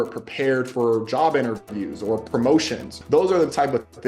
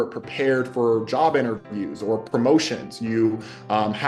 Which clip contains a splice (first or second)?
first